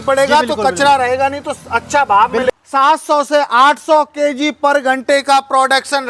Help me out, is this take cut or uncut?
cut